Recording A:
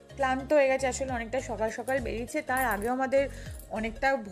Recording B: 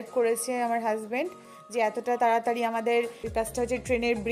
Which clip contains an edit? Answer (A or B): B